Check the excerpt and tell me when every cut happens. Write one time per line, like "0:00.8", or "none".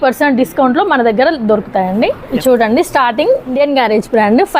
0:02.2
0:03.5